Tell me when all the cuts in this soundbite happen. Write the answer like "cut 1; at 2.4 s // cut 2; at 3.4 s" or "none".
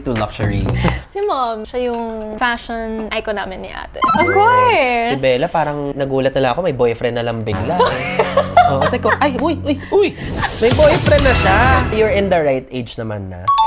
cut 1; at 4.1 s // cut 2; at 5.5 s